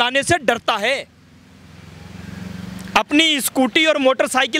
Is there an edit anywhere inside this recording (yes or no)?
no